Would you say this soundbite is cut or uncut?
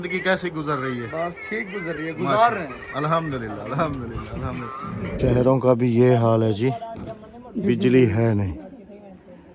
cut